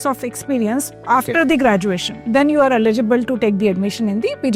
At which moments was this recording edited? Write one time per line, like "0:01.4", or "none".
0:02.1